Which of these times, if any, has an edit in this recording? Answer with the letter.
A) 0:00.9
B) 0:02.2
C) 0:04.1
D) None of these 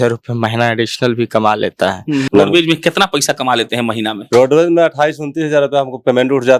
B